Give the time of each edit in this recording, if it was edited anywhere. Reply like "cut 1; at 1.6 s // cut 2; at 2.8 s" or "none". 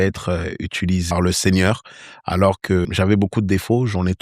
cut 1; at 1.1 s // cut 2; at 2.9 s